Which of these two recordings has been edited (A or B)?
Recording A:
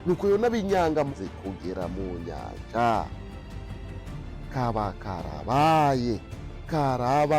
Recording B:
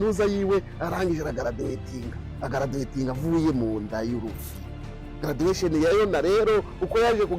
A